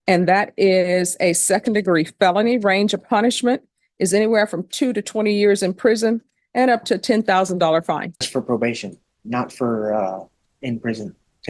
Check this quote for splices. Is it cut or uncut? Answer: cut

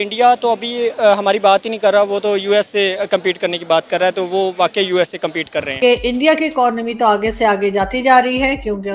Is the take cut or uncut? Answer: cut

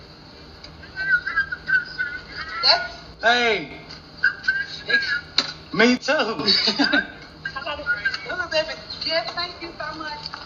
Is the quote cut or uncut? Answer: uncut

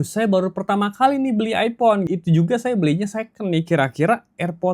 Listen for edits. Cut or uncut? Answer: cut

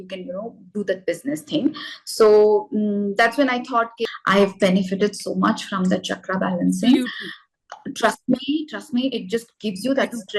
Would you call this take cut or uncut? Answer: cut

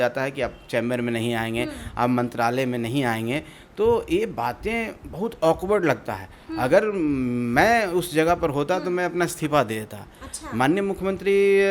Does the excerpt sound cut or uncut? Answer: uncut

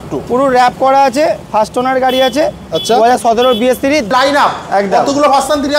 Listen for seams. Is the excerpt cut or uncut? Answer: cut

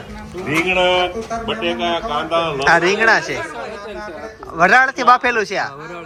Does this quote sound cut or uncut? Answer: uncut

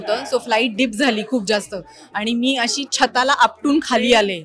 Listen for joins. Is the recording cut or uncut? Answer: uncut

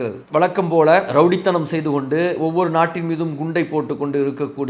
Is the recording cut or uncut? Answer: cut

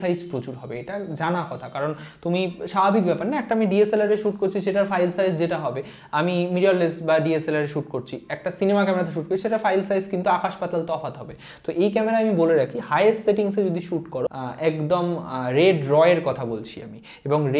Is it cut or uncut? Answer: cut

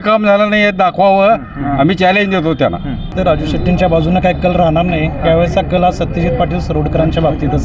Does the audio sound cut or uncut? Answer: cut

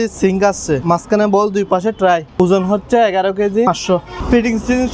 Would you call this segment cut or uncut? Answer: cut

